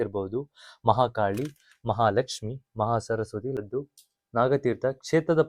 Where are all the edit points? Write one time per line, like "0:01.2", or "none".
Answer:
0:03.5